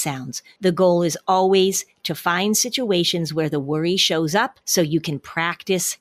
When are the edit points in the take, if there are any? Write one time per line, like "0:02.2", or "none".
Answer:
none